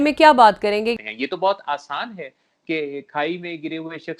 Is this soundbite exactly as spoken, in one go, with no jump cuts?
no; 1 cut; at 1.0 s

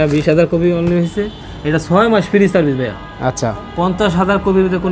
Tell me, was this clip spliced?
no; 0 cuts

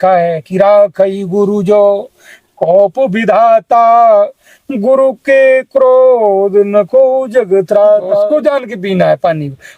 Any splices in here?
yes; 1 cut; at 8.3 s

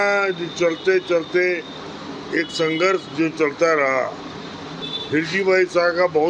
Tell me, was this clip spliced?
no; 0 cuts

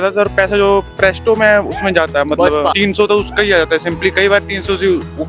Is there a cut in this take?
yes; 1 cut; at 2.8 s

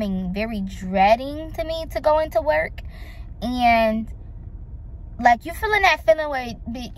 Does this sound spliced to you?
no; 0 cuts

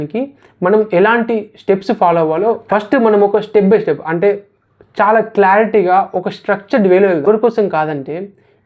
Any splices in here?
yes; 2 cuts; at 2.6 s, 7.2 s

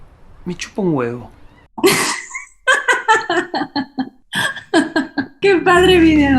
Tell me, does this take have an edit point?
yes; 2 cuts; at 4.3 s, 5.3 s

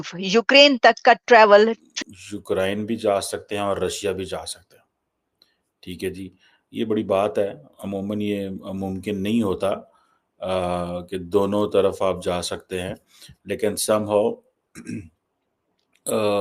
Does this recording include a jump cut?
yes; 1 cut; at 1.8 s

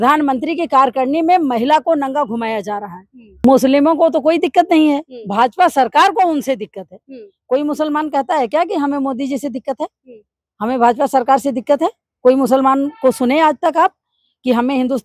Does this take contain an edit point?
yes; 1 cut; at 3.4 s

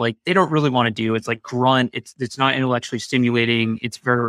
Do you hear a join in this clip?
no; 0 cuts

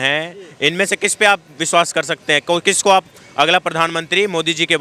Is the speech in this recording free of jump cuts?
yes; 0 cuts

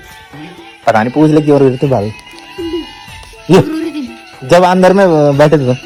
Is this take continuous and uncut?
yes; 0 cuts

